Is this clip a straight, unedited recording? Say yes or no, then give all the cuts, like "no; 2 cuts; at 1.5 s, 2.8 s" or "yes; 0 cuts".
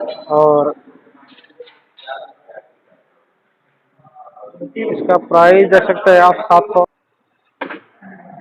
no; 1 cut; at 6.8 s